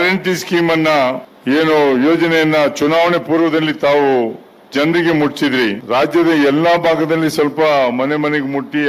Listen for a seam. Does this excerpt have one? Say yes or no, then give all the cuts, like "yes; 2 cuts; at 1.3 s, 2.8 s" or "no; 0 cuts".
yes; 2 cuts; at 1.3 s, 5.8 s